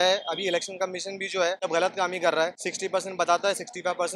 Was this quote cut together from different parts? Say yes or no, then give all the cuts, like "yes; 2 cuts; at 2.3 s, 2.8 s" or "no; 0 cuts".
yes; 2 cuts; at 1.6 s, 2.6 s